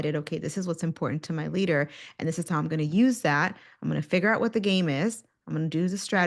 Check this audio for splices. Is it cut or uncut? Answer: uncut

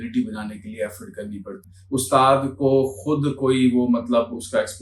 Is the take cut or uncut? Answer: cut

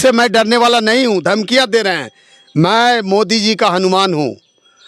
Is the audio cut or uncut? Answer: uncut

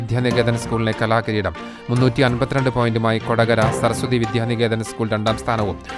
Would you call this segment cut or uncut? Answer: uncut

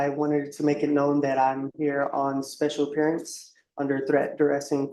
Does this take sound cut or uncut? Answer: uncut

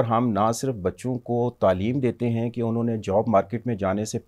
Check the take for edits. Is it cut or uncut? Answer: uncut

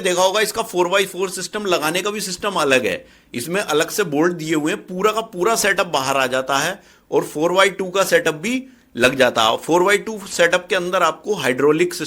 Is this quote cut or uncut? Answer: uncut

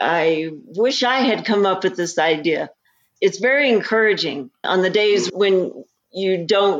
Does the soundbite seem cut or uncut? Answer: cut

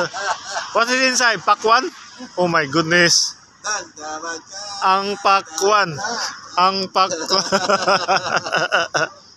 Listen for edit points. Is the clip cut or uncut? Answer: uncut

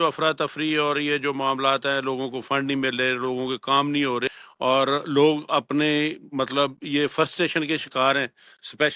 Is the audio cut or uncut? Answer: cut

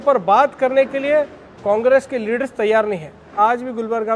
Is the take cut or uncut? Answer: cut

